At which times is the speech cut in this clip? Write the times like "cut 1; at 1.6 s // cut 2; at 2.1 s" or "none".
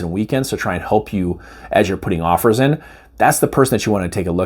none